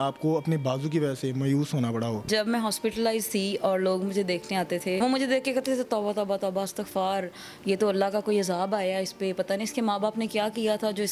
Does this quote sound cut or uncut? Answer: cut